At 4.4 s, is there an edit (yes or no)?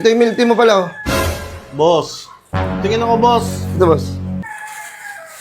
yes